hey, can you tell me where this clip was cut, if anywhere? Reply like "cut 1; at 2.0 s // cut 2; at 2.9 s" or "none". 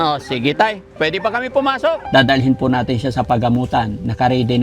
cut 1; at 2.0 s